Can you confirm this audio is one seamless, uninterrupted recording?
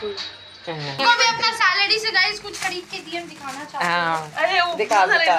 no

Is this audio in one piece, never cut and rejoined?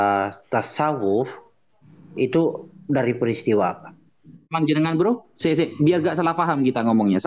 no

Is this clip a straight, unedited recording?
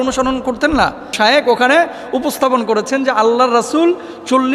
no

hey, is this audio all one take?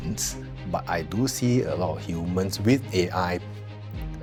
yes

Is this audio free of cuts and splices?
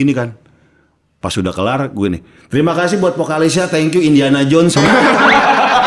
yes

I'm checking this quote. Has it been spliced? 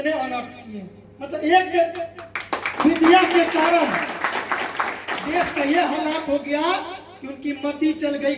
no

